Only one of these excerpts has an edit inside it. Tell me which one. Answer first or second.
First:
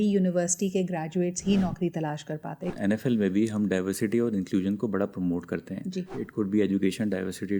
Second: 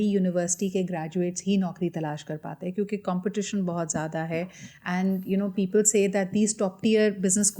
first